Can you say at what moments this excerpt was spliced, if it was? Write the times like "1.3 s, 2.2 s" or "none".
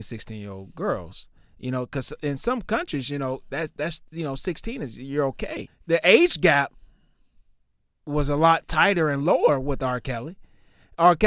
5.7 s